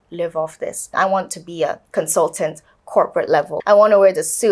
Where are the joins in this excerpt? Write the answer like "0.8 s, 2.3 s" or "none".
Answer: 0.9 s, 1.8 s, 3.6 s